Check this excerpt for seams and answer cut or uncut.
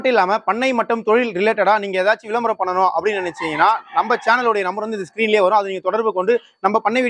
uncut